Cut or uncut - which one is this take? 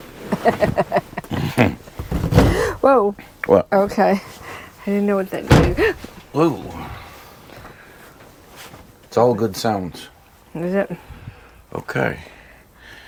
uncut